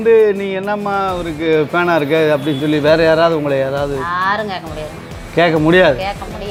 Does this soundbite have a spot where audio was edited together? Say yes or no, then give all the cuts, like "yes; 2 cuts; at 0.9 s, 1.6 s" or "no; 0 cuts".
no; 0 cuts